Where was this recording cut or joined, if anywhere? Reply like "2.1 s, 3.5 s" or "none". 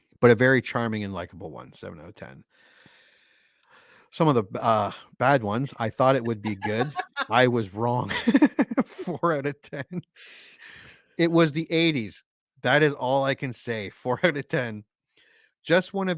none